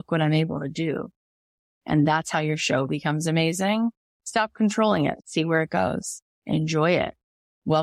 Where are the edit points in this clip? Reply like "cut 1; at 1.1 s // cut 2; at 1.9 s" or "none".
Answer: cut 1; at 4.1 s // cut 2; at 5.2 s